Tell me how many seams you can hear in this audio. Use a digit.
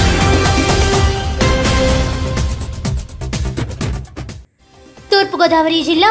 0